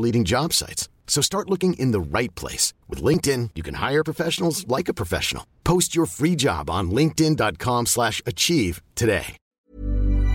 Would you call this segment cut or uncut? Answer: cut